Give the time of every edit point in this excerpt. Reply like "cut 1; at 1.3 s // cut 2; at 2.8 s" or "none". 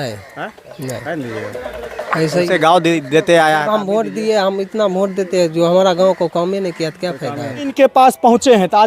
cut 1; at 7.7 s